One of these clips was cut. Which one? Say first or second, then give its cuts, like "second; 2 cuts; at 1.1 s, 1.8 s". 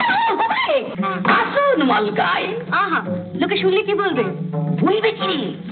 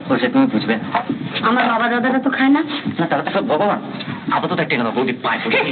first; 1 cut; at 0.9 s